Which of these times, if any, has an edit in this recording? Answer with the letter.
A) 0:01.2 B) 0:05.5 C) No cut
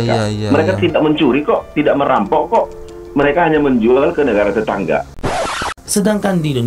B